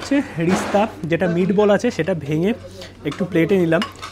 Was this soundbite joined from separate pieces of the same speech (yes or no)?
no